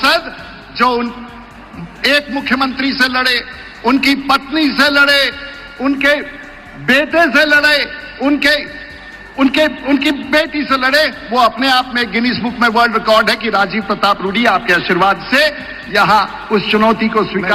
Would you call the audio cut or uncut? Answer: uncut